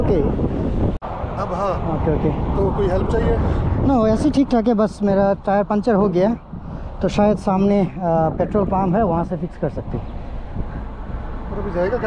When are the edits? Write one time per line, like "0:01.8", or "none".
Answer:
0:01.0